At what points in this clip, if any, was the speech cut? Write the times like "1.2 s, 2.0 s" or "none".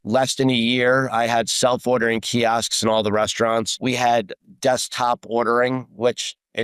3.7 s